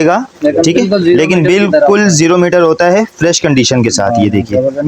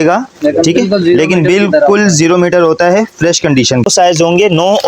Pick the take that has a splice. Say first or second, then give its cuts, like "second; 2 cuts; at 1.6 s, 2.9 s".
second; 1 cut; at 3.9 s